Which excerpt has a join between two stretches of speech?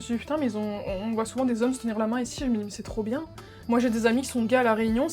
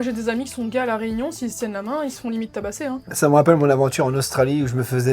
second; 1 cut; at 3.1 s

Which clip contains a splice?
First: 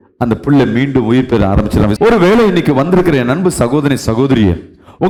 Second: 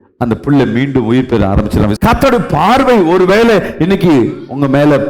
second; 1 cut; at 1.9 s

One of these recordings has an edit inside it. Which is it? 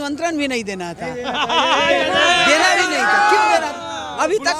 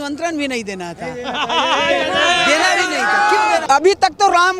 second; 1 cut; at 3.6 s

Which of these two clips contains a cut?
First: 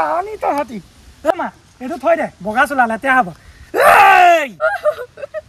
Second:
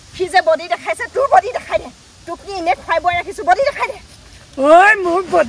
first; 2 cuts; at 1.4 s, 4.5 s

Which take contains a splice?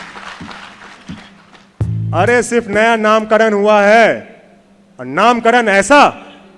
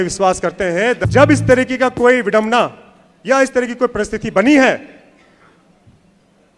second; 1 cut; at 1.0 s

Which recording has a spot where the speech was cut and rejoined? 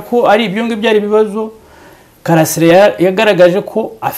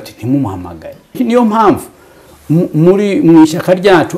second; 1 cut; at 1.2 s

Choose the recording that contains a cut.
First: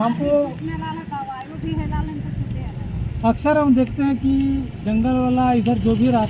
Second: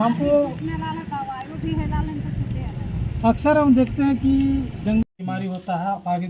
second; 1 cut; at 5.0 s

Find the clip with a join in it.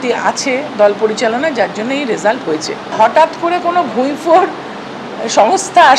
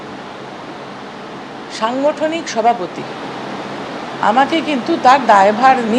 first; 1 cut; at 2.8 s

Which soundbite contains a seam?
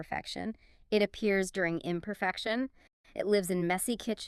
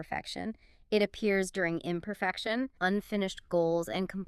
second; 1 cut; at 2.7 s

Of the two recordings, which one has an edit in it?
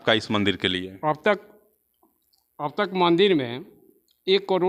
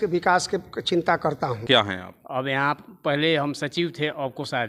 second; 1 cut; at 1.6 s

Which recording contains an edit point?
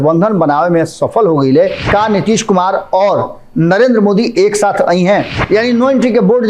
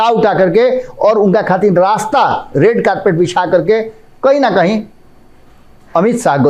first; 2 cuts; at 1.9 s, 5.3 s

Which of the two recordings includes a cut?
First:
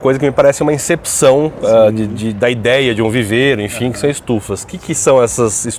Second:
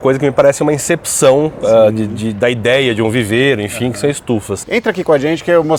second; 1 cut; at 4.6 s

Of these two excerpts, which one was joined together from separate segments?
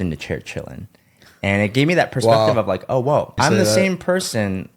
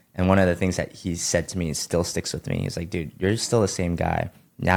first; 1 cut; at 3.3 s

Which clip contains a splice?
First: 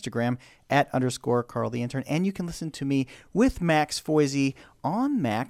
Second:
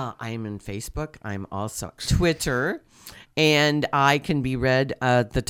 second; 1 cut; at 1.9 s

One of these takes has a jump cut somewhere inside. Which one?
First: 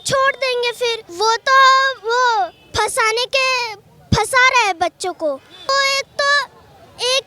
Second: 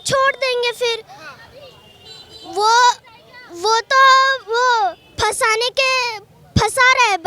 first; 2 cuts; at 1.0 s, 5.7 s

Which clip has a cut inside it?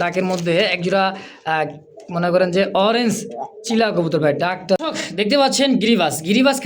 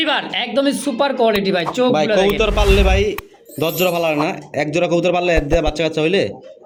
first; 1 cut; at 4.8 s

